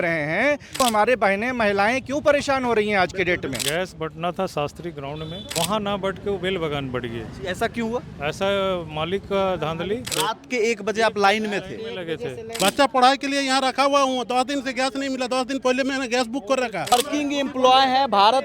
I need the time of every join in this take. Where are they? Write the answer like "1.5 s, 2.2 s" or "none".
0.8 s, 3.6 s, 5.5 s, 10.1 s, 12.4 s, 16.9 s

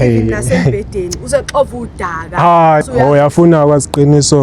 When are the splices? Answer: 2.8 s

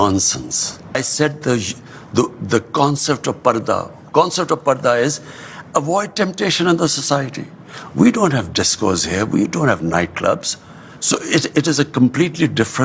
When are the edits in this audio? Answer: 0.9 s

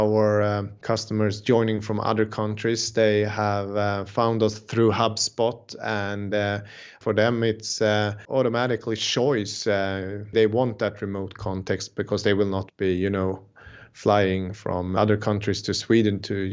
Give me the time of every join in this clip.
7.0 s, 8.2 s, 10.3 s, 15.0 s

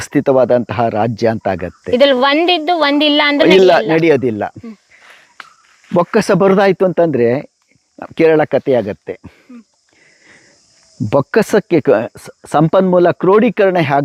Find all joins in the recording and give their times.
none

